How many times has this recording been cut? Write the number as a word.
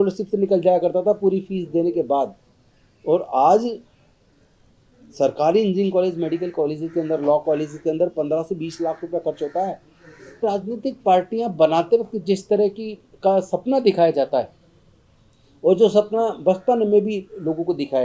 one